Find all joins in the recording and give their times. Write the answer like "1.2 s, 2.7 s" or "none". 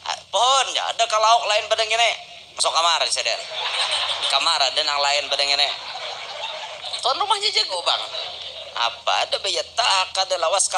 7.6 s